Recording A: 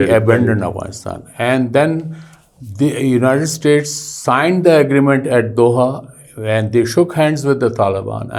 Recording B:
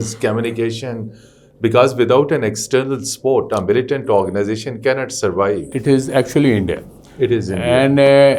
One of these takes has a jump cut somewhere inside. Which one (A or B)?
B